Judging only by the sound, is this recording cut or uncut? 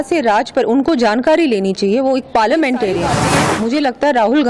cut